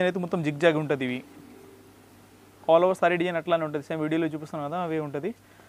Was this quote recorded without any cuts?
yes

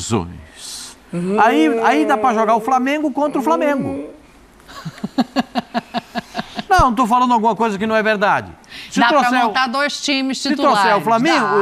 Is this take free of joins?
yes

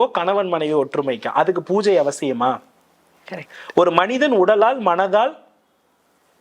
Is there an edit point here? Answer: no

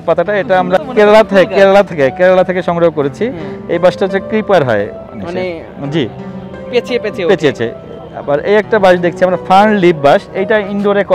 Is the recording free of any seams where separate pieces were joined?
yes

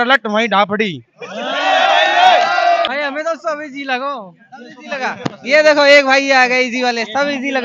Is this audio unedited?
no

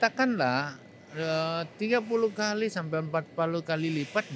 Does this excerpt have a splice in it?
no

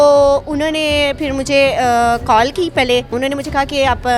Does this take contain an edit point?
yes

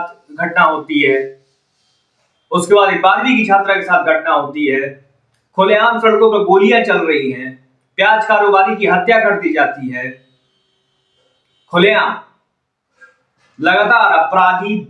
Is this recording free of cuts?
yes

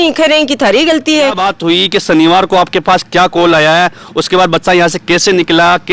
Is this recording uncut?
no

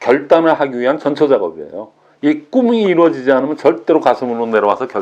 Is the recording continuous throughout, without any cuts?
yes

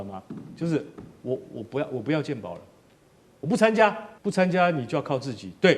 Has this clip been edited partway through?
yes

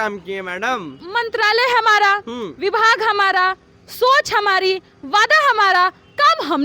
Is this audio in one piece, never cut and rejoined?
no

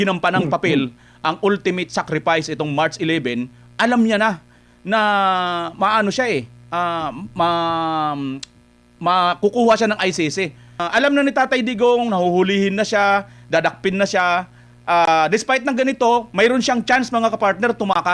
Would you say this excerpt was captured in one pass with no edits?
no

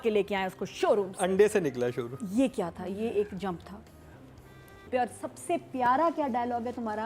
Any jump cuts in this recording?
yes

